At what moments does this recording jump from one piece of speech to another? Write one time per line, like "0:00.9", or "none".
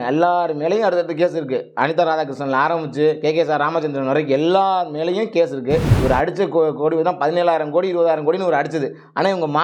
0:05.9